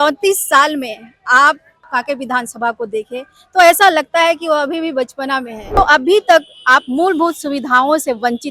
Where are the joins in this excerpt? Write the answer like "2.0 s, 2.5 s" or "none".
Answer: 1.9 s, 5.8 s

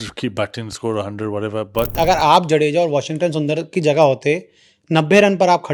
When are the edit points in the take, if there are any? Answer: 1.9 s

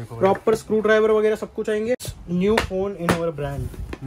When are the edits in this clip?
2.1 s

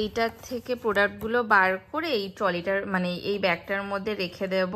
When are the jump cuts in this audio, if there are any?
none

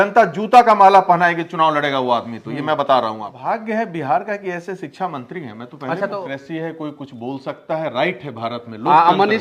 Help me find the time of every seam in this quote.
3.3 s, 6.1 s

